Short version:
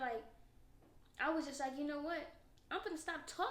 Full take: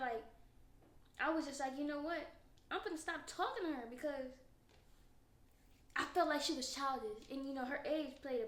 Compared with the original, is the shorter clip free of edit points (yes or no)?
yes